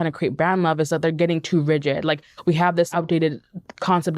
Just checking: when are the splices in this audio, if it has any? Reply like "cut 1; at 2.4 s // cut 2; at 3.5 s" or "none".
cut 1; at 2.9 s